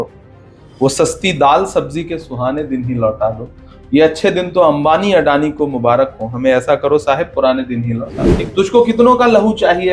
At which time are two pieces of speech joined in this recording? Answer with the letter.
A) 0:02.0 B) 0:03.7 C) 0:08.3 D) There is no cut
C